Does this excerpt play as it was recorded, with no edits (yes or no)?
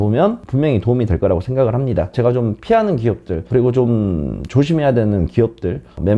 no